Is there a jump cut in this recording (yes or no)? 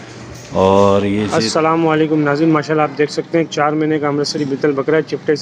yes